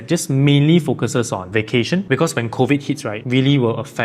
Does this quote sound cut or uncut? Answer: cut